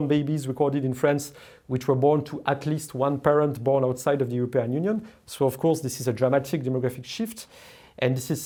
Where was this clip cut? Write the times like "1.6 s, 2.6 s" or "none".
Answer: none